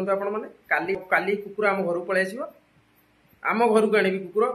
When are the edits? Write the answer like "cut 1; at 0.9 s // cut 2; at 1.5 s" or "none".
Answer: cut 1; at 1.0 s